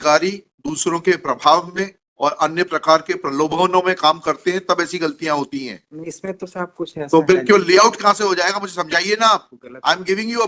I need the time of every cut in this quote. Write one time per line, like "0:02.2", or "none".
none